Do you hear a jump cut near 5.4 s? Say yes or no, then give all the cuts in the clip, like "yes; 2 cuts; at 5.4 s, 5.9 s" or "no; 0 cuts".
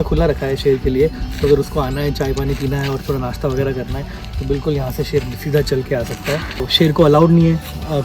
no; 1 cut; at 6.7 s